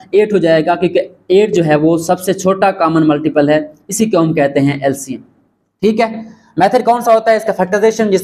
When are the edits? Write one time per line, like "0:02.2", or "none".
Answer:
none